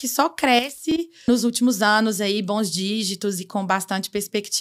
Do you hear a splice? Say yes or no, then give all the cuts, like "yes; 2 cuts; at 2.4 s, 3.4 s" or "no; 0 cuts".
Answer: yes; 1 cut; at 1.3 s